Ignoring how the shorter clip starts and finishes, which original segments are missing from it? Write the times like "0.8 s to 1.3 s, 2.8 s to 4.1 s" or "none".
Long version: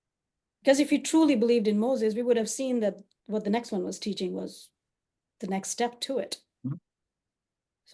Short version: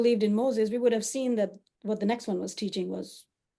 none